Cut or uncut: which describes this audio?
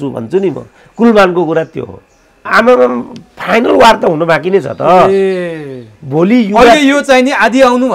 cut